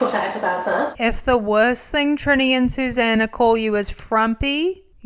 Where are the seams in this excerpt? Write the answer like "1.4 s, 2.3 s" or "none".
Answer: 0.9 s